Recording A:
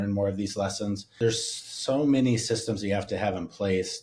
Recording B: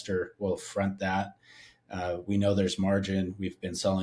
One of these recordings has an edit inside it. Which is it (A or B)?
A